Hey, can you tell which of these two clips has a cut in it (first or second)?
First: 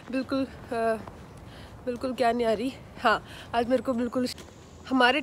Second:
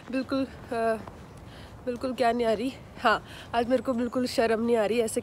first